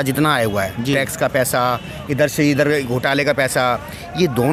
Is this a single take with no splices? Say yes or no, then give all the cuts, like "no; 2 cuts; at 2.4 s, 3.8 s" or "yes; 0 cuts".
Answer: yes; 0 cuts